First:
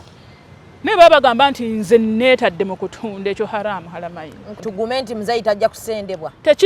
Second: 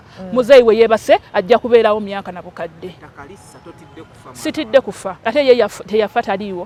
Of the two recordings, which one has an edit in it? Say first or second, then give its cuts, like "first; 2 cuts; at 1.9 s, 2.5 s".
first; 1 cut; at 4.5 s